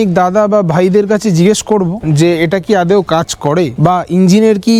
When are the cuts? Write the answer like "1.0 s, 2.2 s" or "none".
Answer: none